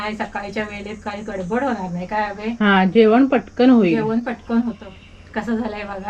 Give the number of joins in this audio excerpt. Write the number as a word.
one